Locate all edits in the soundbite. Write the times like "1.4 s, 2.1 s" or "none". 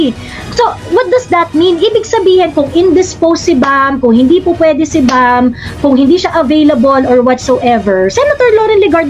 none